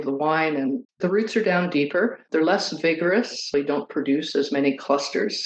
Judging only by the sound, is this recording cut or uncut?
cut